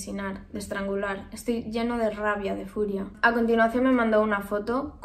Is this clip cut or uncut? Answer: cut